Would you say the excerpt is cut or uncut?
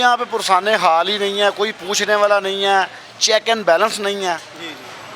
uncut